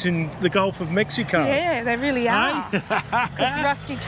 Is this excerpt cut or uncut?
uncut